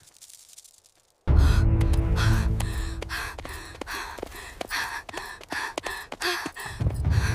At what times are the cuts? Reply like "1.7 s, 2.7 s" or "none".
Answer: 1.2 s